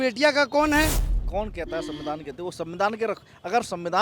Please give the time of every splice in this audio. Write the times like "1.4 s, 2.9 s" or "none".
1.1 s